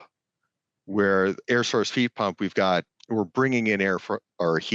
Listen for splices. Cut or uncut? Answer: cut